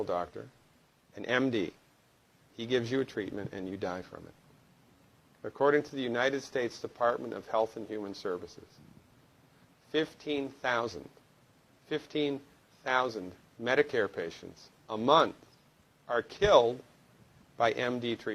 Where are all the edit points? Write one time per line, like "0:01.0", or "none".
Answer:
none